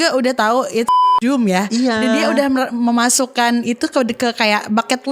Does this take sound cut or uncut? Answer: cut